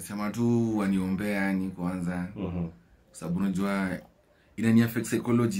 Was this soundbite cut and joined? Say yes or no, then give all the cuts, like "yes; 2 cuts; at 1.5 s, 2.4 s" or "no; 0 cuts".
no; 0 cuts